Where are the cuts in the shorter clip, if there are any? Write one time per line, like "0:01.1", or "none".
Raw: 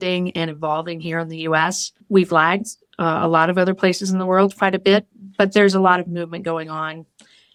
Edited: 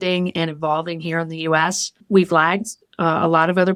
none